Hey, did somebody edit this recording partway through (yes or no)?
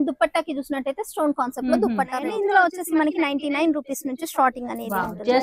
yes